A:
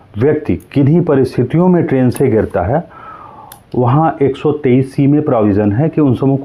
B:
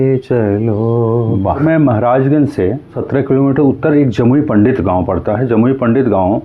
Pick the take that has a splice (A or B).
B